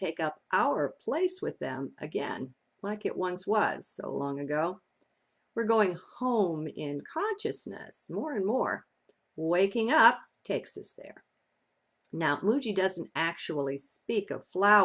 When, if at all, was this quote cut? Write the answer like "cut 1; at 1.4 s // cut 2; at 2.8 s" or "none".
cut 1; at 4.7 s